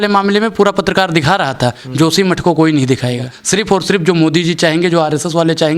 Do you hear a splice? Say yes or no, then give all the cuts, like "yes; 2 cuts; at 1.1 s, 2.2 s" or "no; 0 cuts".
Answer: yes; 1 cut; at 3.3 s